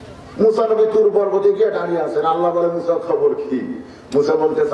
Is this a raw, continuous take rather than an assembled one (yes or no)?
yes